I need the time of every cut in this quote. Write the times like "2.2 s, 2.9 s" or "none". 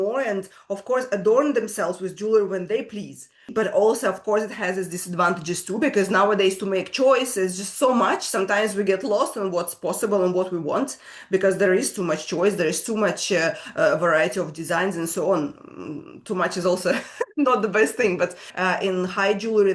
3.5 s, 18.5 s